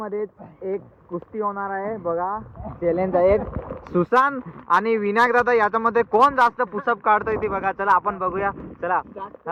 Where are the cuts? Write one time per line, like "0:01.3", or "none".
none